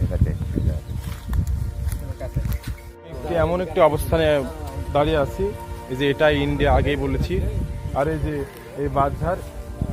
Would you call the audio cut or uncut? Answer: uncut